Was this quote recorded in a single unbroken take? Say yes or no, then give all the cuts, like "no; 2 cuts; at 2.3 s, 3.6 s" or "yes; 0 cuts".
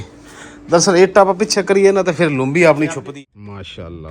no; 1 cut; at 3.0 s